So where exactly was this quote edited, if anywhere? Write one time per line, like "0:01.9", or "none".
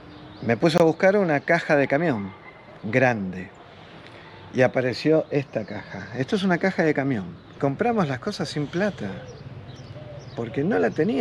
0:07.4

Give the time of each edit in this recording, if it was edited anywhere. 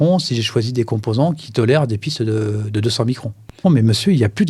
0:03.6

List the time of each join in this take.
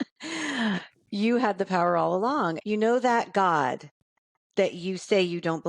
0:02.6

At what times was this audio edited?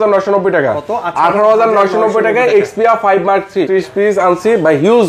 0:03.7

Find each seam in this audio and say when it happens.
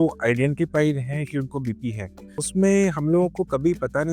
0:02.4

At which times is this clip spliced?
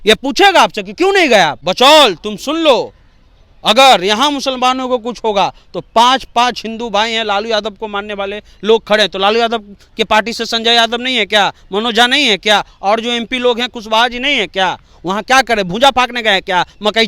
0:01.6

